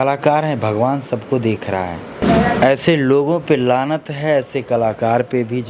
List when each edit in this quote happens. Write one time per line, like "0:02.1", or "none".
0:02.2